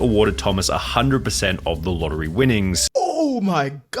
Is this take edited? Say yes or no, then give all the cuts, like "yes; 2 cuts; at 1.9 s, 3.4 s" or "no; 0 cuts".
yes; 1 cut; at 2.8 s